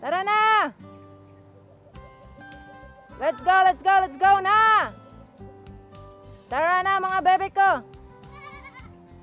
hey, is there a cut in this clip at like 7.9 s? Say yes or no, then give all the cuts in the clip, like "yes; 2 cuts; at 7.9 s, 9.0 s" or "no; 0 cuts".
no; 0 cuts